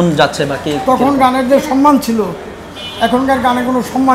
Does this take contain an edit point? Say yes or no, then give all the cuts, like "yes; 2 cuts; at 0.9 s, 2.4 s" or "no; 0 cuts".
no; 0 cuts